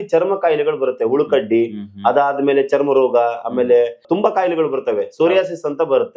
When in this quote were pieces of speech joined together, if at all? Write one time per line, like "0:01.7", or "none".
none